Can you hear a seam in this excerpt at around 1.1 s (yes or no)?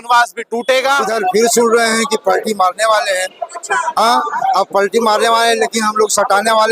yes